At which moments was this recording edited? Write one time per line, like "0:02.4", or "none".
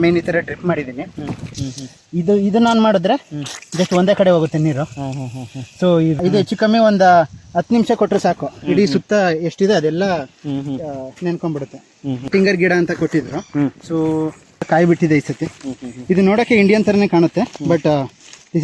0:01.5
0:06.2
0:12.3
0:14.7